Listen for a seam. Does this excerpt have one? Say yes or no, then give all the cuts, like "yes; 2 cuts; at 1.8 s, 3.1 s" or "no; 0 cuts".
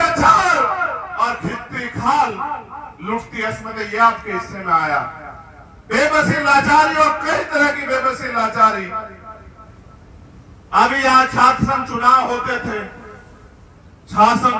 no; 0 cuts